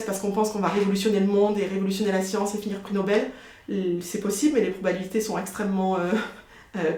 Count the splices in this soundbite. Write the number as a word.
zero